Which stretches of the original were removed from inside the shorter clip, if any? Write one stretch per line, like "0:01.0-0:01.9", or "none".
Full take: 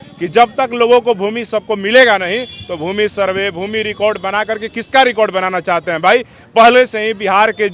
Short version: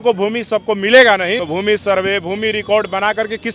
0:02.4-0:02.7